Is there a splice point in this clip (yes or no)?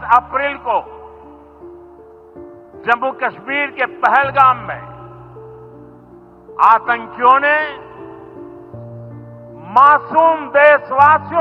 no